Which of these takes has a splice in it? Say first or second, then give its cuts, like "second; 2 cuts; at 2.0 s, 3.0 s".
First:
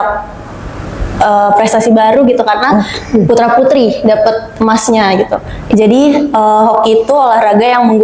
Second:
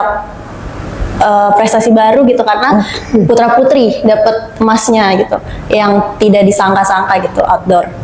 first; 1 cut; at 5.5 s